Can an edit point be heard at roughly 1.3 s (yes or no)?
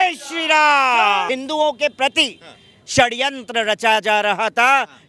yes